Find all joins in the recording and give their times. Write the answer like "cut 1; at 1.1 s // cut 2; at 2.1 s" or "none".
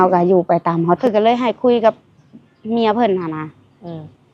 cut 1; at 1.0 s

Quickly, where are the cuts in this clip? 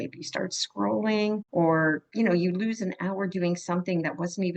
cut 1; at 1.4 s // cut 2; at 2.0 s

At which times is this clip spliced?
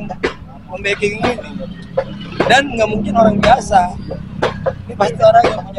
none

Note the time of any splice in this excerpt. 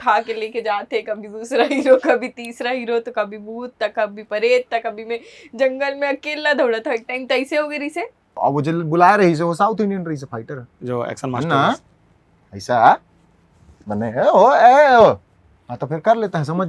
cut 1; at 8.4 s

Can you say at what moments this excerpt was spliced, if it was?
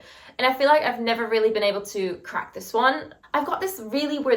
cut 1; at 3.2 s

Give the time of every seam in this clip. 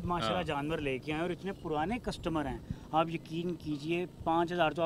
none

